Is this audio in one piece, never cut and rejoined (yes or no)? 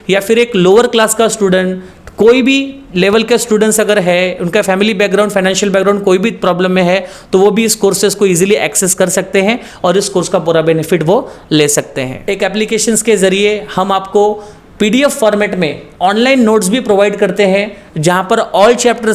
no